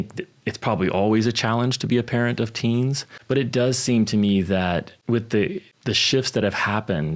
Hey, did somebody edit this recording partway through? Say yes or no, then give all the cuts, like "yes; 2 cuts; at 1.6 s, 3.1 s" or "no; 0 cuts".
yes; 3 cuts; at 3.1 s, 4.9 s, 5.7 s